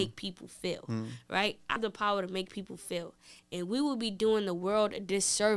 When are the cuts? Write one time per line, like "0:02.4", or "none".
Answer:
0:01.8

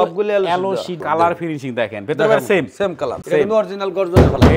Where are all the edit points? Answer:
0:01.0
0:03.2

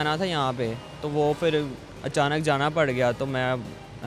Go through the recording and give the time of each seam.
none

